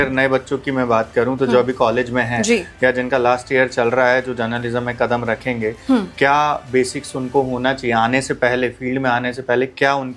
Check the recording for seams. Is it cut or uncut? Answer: uncut